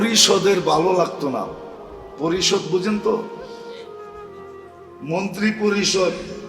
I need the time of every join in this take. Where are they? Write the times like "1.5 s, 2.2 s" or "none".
3.3 s, 5.0 s